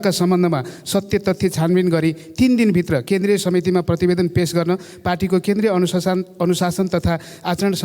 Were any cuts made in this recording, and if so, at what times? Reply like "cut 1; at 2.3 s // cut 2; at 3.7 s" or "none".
none